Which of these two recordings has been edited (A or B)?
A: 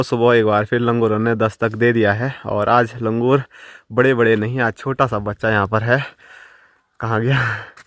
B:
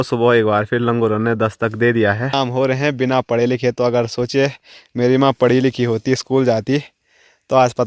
B